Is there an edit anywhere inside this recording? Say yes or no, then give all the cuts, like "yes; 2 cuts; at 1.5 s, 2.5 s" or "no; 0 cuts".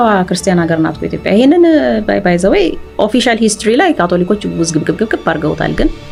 no; 0 cuts